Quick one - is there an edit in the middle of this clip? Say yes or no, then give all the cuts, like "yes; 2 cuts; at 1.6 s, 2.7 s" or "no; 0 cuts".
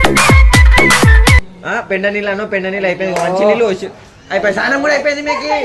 yes; 1 cut; at 1.4 s